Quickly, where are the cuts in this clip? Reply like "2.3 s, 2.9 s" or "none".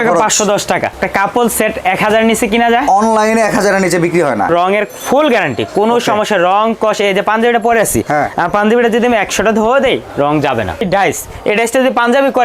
0.9 s, 4.5 s, 10.8 s